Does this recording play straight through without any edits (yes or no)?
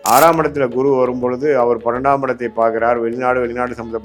yes